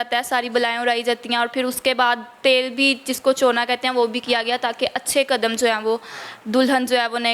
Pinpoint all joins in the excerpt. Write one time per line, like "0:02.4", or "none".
none